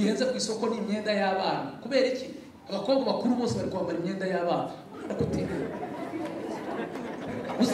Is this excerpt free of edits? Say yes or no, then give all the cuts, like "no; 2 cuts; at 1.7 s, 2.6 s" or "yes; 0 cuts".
yes; 0 cuts